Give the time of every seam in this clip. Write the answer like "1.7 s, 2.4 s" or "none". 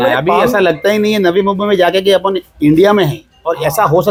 none